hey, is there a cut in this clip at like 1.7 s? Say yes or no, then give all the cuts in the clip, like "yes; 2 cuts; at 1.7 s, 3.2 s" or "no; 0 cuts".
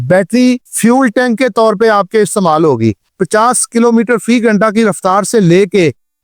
no; 1 cut; at 3.2 s